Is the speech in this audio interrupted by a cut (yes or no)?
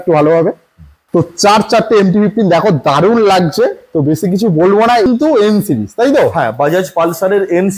yes